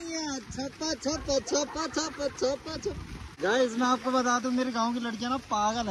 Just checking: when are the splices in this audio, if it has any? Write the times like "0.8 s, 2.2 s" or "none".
none